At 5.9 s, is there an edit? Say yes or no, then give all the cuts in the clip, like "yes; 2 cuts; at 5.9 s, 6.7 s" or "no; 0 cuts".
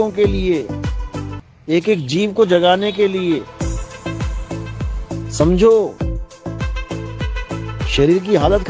yes; 2 cuts; at 5.9 s, 7.9 s